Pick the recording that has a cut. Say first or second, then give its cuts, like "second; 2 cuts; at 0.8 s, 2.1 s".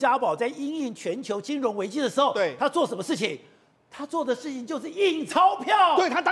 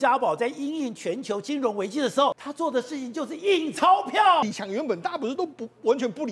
second; 2 cuts; at 2.3 s, 4.4 s